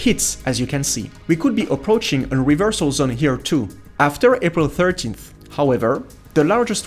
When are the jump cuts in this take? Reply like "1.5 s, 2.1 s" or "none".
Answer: 1.1 s, 3.8 s